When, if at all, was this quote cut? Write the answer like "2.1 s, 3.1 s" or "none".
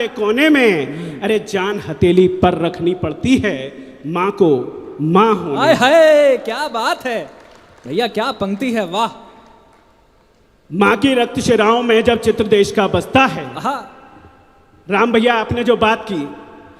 none